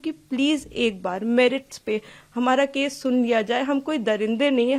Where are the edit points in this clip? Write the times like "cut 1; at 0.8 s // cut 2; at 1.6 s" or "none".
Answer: none